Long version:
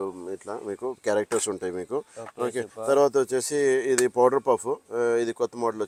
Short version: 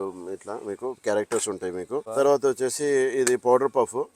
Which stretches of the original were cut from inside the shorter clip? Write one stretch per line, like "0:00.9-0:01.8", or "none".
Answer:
0:02.1-0:02.8